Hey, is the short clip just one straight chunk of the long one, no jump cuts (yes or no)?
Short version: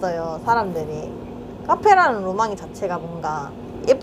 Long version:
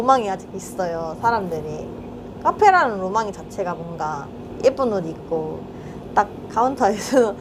yes